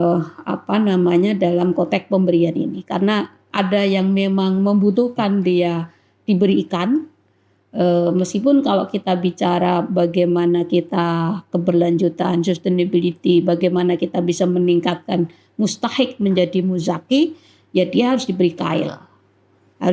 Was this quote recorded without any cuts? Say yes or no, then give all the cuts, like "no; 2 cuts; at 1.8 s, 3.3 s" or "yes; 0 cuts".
yes; 0 cuts